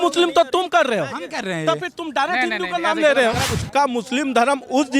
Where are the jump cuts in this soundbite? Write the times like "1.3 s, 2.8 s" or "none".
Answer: 3.4 s